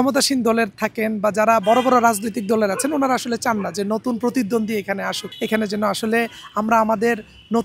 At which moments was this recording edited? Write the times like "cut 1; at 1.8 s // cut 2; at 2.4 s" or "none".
cut 1; at 5.2 s